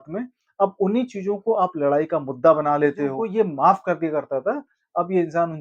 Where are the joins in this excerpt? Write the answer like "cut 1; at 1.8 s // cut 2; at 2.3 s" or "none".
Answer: cut 1; at 3.2 s